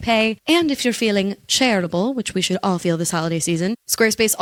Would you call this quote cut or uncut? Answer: uncut